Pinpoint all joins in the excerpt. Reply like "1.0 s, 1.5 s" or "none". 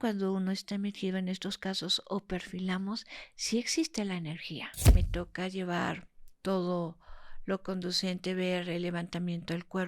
5.0 s